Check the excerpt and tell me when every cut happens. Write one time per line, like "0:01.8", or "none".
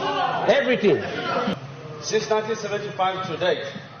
0:01.6

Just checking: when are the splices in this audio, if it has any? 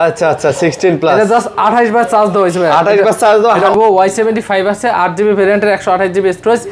0:03.7

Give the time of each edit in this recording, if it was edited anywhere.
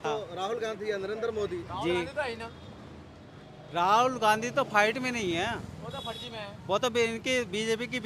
none

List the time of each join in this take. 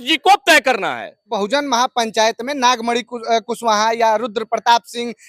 0:01.4

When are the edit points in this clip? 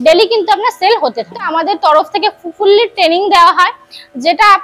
0:01.5

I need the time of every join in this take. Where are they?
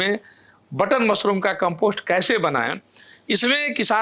none

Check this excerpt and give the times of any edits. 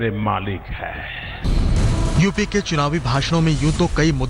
0:01.5

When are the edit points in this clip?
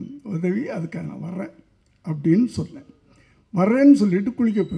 none

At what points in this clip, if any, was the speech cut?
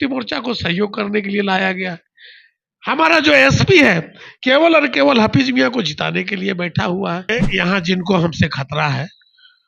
0:07.3

